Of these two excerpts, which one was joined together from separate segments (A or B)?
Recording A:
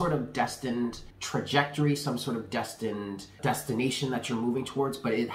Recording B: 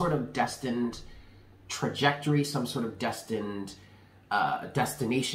A